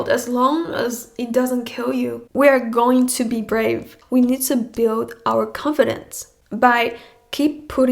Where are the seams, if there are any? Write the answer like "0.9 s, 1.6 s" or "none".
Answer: 2.2 s, 3.9 s